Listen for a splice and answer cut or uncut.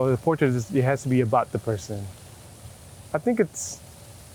uncut